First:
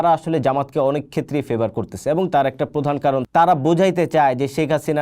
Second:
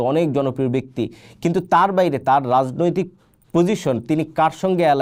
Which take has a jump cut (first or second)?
first